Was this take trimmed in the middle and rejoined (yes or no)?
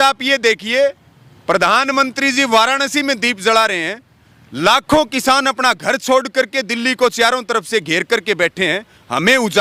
no